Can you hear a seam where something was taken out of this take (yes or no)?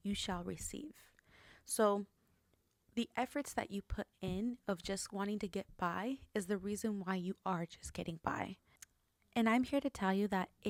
no